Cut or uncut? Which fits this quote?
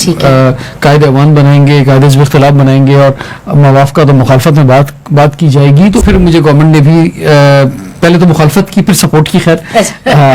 cut